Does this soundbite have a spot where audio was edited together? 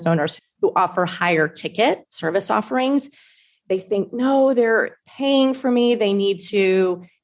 yes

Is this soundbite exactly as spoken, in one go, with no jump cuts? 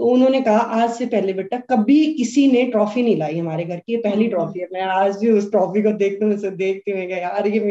yes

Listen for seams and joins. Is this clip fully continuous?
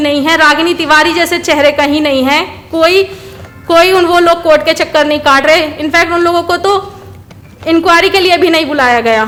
yes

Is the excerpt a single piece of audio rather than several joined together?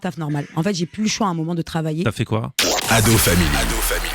no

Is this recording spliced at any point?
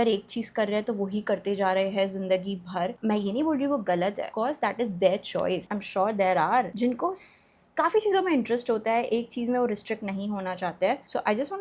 no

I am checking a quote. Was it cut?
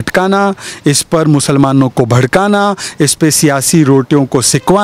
no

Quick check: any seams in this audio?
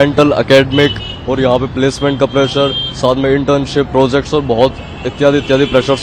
no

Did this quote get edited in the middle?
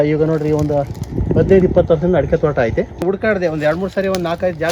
yes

